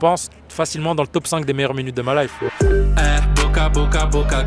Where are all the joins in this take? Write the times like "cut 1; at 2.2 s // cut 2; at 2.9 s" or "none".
cut 1; at 2.3 s